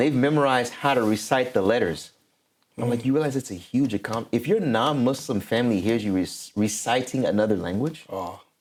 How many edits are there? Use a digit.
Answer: 0